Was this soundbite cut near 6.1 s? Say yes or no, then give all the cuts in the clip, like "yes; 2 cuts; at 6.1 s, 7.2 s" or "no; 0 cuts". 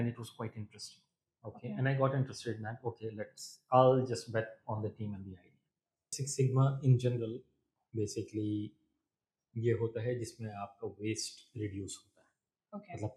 yes; 1 cut; at 6.1 s